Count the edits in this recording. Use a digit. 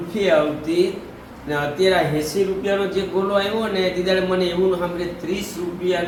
0